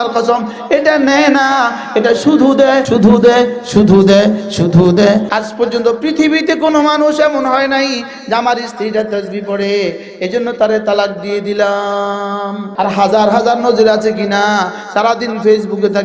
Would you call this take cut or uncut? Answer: cut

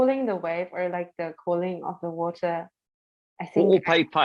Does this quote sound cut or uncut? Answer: uncut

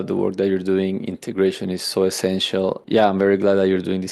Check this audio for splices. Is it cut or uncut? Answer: cut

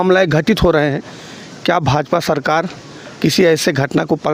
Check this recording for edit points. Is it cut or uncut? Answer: uncut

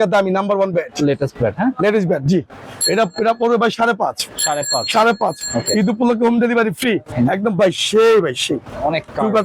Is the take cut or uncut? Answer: cut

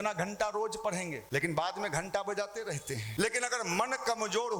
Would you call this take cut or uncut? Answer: cut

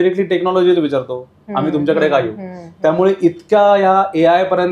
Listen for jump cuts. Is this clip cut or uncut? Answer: uncut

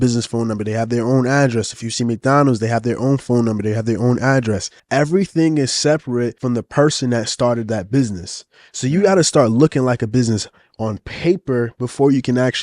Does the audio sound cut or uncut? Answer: cut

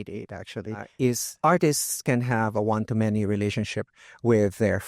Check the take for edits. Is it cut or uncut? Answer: cut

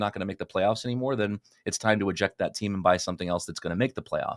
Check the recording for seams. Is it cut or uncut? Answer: uncut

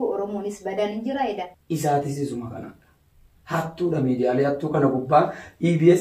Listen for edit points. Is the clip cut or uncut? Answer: cut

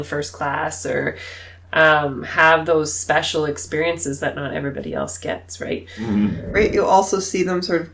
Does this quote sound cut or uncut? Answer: cut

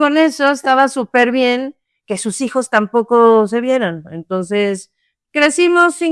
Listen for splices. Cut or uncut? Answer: uncut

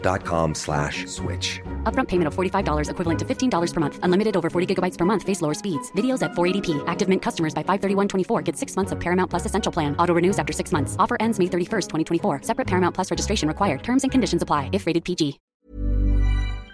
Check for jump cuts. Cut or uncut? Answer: cut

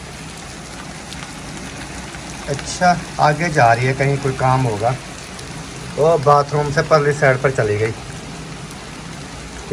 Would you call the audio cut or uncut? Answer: uncut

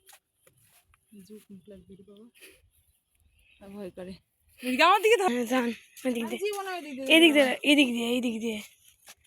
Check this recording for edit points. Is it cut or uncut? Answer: cut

